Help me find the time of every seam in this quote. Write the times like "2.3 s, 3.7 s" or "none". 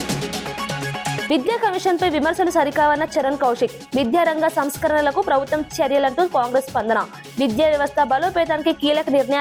none

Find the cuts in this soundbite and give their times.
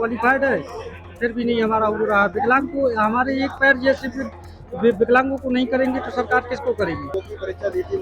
7.1 s

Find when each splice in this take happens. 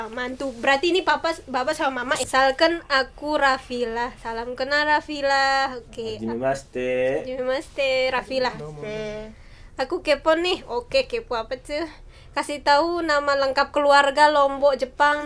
2.1 s

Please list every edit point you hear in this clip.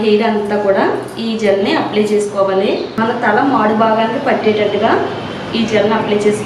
2.9 s

